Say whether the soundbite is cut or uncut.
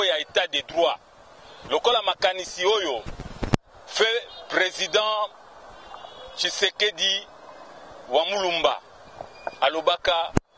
uncut